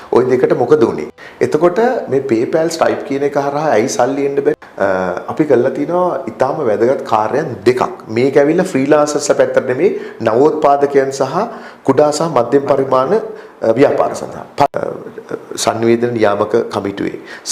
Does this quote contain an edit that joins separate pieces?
yes; 3 cuts; at 1.1 s, 4.6 s, 14.7 s

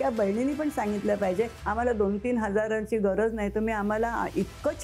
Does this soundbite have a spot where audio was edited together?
yes; 1 cut; at 1.6 s

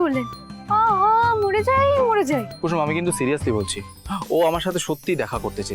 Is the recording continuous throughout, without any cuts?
no; 1 cut; at 2.5 s

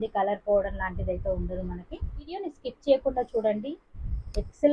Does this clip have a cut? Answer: yes; 1 cut; at 2.5 s

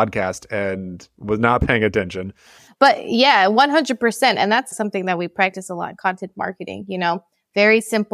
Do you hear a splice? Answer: yes; 1 cut; at 4.7 s

